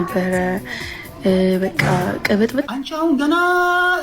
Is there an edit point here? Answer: yes; 1 cut; at 2.7 s

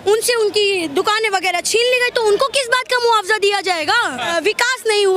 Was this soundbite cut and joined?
yes; 1 cut; at 4.2 s

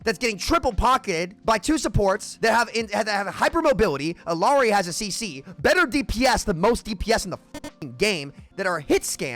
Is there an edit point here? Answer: yes; 2 cuts; at 1.3 s, 2.3 s

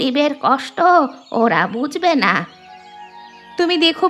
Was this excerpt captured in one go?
yes; 0 cuts

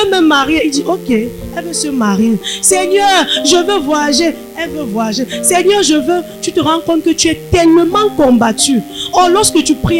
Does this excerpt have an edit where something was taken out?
no; 0 cuts

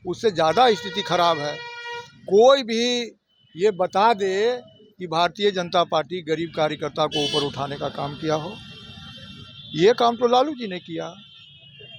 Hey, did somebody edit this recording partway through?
no; 0 cuts

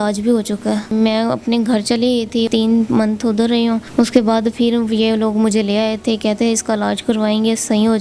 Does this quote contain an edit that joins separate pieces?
yes; 3 cuts; at 0.9 s, 2.5 s, 3.8 s

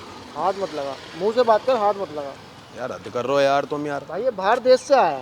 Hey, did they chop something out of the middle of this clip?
no; 0 cuts

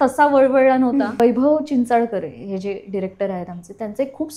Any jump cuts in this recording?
yes; 1 cut; at 1.2 s

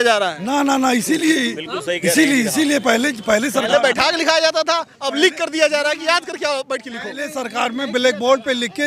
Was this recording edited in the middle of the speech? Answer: no; 0 cuts

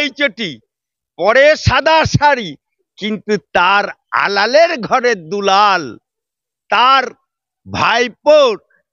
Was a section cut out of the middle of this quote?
no; 0 cuts

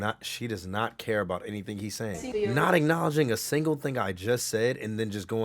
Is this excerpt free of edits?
no; 1 cut; at 2.2 s

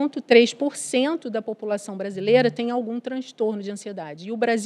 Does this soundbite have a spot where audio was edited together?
no; 0 cuts

